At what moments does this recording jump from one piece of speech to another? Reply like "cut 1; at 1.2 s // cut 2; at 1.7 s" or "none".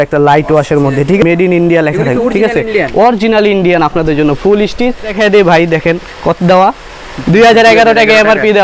cut 1; at 1.2 s // cut 2; at 5.2 s